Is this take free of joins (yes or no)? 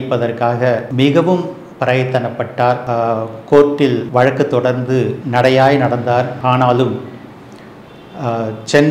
no